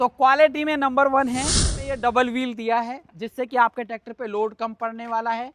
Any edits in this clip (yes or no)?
yes